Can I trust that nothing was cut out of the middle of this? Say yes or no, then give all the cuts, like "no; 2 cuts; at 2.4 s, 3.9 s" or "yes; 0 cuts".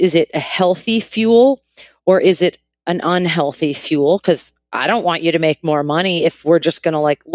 yes; 0 cuts